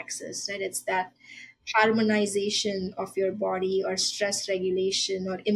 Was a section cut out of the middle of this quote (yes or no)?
no